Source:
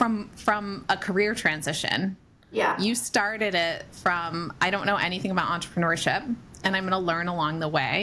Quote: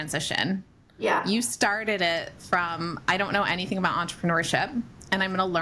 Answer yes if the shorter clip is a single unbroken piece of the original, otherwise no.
yes